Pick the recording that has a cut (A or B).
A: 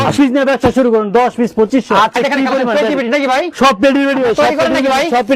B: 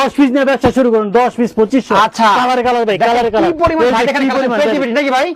A